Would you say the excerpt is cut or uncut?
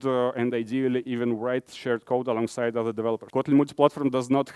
cut